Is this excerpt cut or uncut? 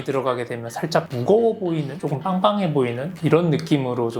cut